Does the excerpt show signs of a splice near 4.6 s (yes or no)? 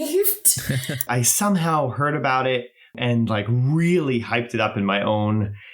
no